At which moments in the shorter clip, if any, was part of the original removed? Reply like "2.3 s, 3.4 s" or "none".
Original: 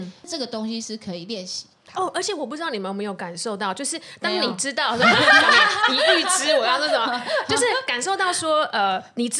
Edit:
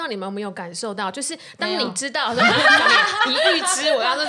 none